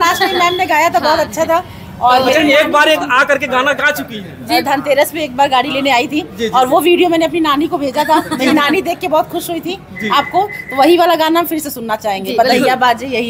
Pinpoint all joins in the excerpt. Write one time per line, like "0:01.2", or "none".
none